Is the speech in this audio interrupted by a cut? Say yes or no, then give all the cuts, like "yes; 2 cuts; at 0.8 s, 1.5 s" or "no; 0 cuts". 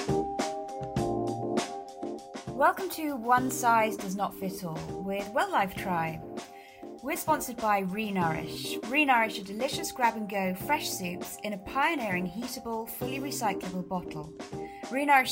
yes; 1 cut; at 2.5 s